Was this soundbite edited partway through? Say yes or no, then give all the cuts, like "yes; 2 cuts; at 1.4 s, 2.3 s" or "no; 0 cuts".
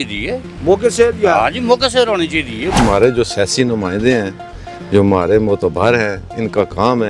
yes; 1 cut; at 2.6 s